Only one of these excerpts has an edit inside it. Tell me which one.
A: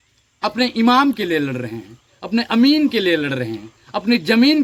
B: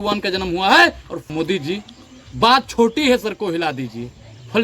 B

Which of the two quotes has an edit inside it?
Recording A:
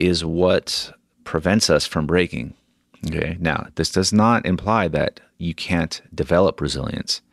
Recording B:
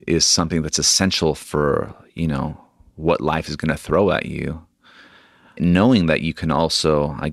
B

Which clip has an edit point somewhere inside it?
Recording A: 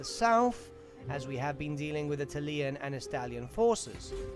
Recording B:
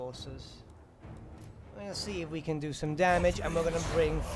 B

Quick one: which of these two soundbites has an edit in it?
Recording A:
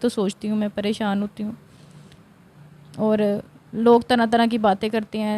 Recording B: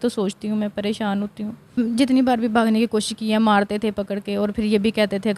B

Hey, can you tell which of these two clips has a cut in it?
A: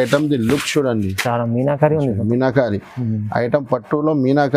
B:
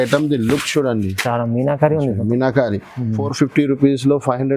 B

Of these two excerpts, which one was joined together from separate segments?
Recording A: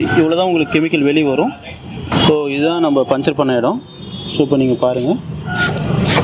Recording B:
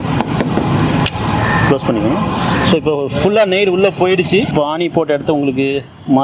A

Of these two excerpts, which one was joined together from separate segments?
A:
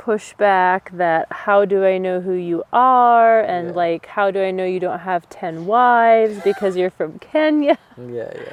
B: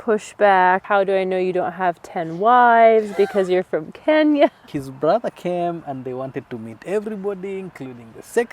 B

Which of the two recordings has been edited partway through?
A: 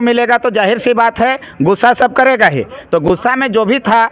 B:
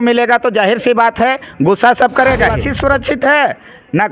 B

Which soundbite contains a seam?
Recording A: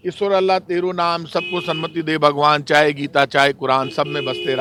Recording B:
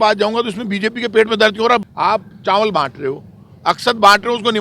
B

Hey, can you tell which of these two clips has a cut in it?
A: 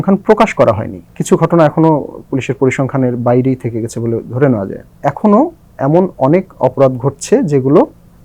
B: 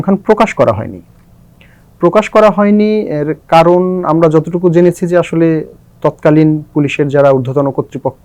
A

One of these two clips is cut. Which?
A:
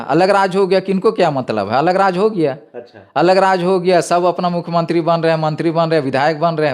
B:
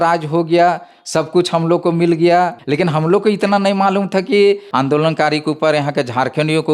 B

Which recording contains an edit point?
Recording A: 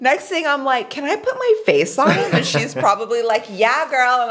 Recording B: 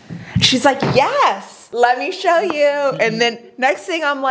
B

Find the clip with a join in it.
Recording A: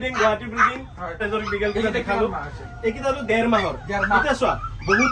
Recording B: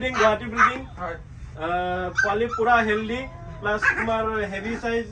A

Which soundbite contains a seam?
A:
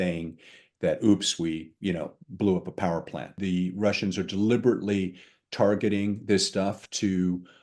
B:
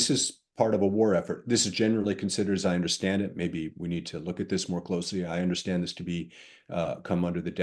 A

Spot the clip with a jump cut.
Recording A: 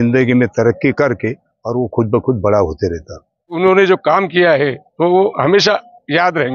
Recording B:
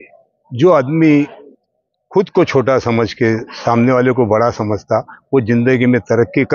A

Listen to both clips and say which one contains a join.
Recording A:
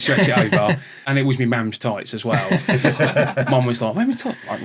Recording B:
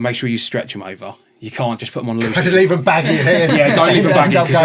A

